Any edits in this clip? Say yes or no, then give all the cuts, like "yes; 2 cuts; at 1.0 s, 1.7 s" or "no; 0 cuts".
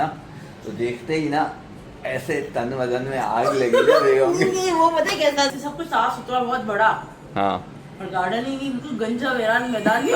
yes; 1 cut; at 5.5 s